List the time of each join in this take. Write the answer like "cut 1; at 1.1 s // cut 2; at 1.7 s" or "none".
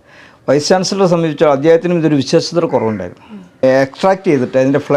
cut 1; at 3.6 s